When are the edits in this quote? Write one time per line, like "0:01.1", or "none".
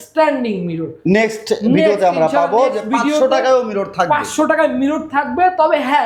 none